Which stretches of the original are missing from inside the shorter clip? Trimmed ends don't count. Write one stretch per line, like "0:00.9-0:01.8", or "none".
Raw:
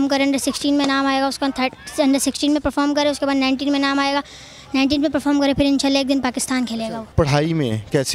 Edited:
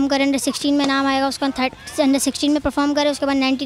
none

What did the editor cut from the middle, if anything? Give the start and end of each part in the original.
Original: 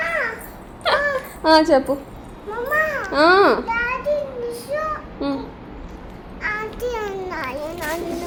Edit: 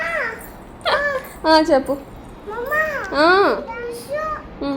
0:03.7-0:04.3

